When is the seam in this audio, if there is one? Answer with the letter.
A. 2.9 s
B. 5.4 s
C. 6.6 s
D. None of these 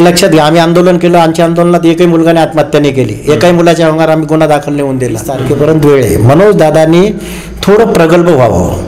B